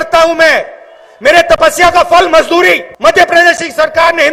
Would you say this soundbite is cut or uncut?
cut